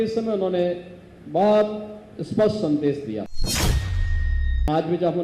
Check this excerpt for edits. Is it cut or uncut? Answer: cut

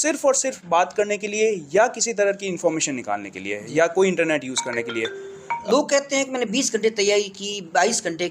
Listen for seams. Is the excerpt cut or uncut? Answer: cut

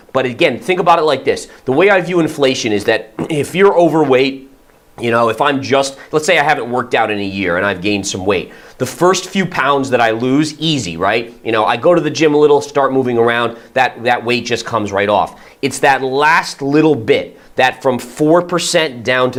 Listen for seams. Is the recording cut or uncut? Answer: uncut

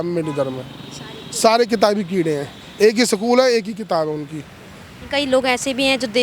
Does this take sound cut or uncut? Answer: uncut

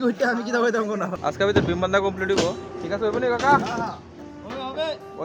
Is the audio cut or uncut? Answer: cut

